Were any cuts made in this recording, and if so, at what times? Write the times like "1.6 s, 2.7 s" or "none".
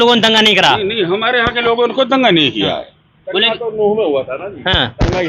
none